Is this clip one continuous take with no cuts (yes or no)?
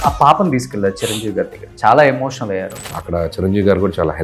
no